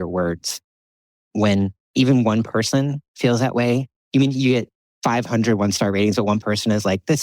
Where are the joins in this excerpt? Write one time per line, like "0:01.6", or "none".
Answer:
0:01.0